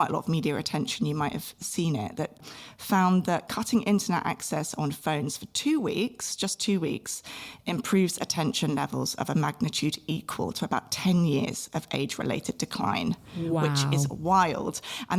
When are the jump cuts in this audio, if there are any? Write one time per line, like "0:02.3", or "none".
0:02.4